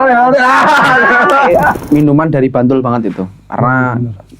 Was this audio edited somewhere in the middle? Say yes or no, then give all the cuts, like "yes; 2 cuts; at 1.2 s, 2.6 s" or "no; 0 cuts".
yes; 1 cut; at 1.7 s